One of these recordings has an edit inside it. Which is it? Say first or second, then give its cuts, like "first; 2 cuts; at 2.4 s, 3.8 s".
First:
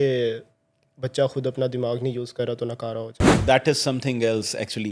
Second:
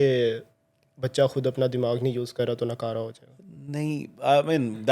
first; 1 cut; at 3.4 s